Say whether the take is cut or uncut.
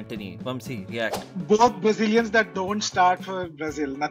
cut